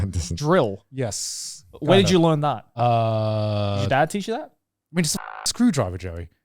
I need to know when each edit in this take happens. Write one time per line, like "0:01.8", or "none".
0:02.7